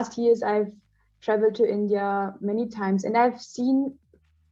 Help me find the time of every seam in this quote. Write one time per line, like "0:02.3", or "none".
none